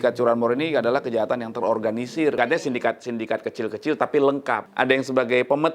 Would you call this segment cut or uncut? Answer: cut